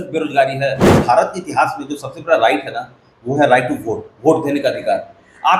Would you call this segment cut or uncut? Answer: cut